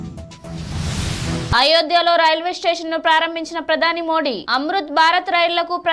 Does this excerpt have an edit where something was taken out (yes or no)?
yes